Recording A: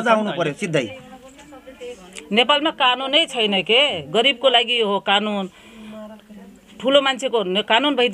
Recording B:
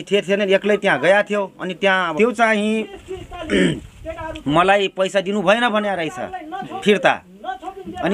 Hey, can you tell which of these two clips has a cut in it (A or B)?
B